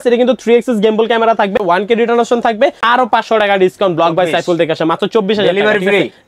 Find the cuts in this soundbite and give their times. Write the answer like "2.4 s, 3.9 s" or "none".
1.6 s, 2.8 s